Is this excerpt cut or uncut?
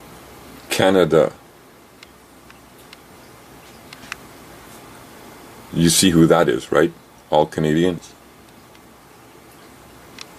uncut